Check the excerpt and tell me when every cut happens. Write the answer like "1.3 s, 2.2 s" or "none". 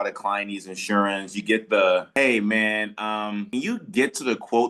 2.1 s, 3.5 s